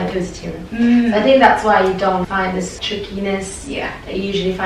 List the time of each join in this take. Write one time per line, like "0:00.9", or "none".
0:02.8